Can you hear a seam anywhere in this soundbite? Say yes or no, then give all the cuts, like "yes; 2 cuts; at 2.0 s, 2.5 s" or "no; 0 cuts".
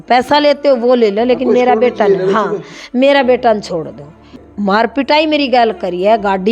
yes; 1 cut; at 4.4 s